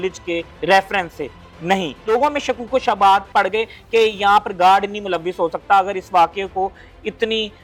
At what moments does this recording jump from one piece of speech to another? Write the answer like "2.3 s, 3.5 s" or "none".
none